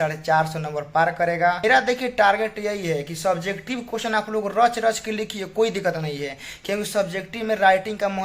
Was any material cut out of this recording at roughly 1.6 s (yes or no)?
yes